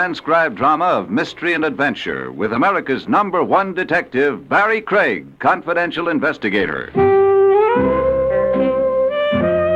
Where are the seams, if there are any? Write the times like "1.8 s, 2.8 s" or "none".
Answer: 1.5 s